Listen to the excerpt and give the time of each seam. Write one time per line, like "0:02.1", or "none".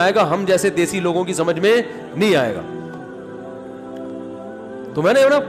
0:03.1
0:04.5